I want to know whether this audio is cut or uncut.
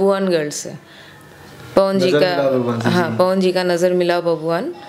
uncut